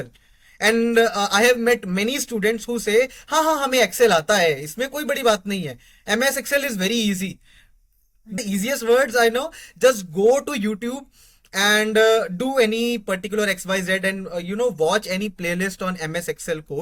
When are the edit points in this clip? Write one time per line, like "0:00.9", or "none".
0:08.4

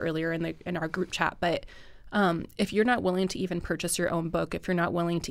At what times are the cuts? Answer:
none

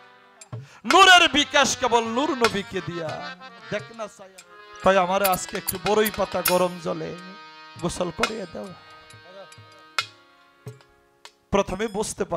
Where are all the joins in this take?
0:04.1

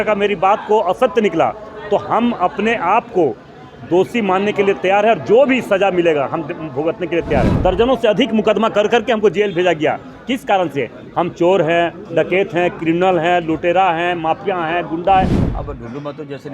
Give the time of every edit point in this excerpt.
0:07.5
0:15.4

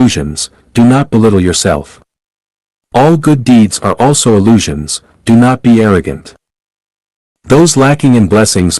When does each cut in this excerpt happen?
0:01.8

